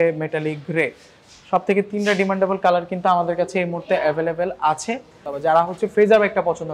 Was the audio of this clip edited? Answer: yes; 1 cut; at 5.3 s

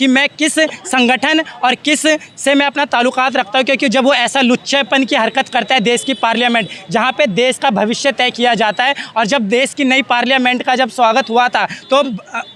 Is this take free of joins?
yes; 0 cuts

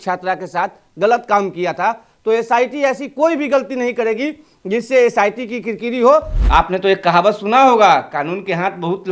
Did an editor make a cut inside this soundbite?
yes; 1 cut; at 6.3 s

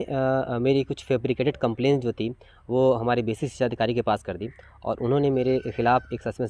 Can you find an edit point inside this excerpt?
no; 0 cuts

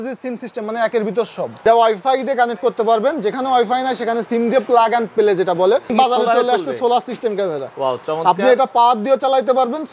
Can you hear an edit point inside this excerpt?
yes; 2 cuts; at 1.6 s, 5.9 s

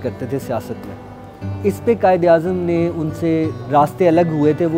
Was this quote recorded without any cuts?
no; 1 cut; at 3.6 s

